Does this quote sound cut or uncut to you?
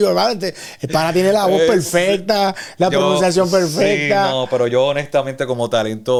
uncut